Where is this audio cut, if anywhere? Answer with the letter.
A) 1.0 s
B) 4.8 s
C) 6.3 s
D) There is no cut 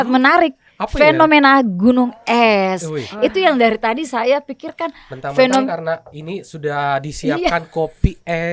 D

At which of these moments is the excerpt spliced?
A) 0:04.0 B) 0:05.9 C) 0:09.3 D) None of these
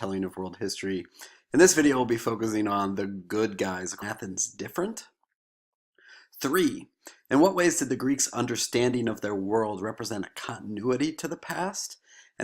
D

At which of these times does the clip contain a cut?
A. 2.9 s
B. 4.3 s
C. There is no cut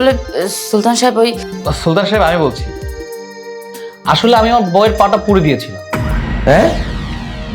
A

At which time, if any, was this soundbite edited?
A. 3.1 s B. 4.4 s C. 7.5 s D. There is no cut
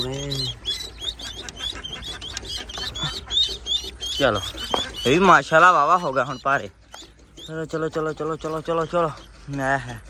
D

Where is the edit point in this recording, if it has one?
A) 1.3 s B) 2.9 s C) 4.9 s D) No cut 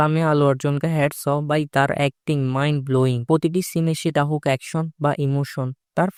D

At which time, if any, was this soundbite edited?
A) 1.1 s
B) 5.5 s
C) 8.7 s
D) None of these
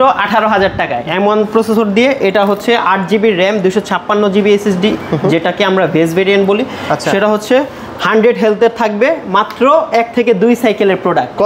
A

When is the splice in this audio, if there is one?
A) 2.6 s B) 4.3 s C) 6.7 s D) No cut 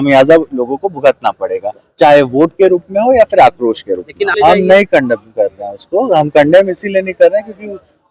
B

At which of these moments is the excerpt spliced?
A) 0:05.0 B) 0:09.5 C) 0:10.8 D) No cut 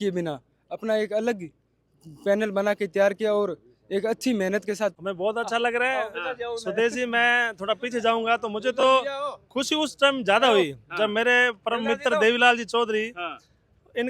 A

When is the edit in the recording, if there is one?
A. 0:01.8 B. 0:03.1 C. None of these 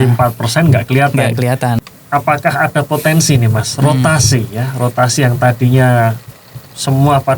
A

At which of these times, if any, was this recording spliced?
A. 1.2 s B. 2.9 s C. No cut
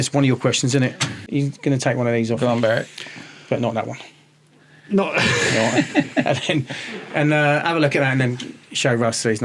A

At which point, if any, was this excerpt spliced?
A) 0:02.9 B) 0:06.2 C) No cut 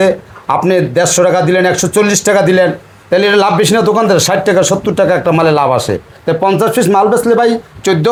C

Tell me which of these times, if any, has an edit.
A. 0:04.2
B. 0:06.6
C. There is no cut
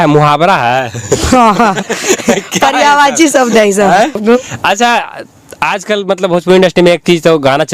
A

